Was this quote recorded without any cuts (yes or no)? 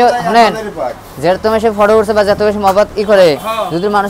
yes